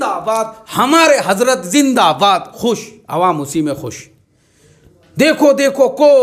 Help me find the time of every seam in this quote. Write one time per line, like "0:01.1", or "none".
none

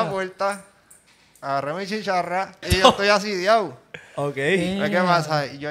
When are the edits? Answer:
0:02.7

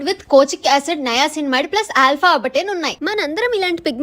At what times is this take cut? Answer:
0:02.9

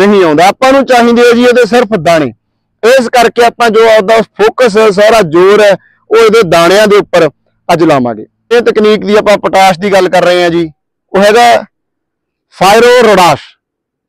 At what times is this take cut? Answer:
0:08.5

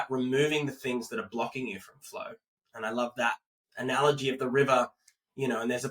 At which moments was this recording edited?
none

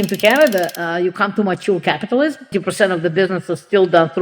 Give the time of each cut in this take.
0:02.5

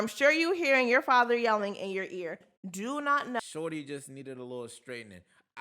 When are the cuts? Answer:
0:03.4

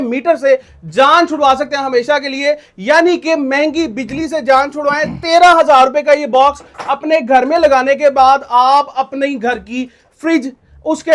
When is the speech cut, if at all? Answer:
none

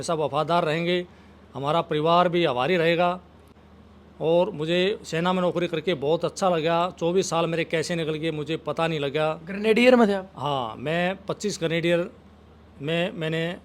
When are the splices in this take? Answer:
none

